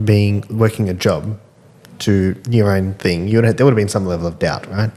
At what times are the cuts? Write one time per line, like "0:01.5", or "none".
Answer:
none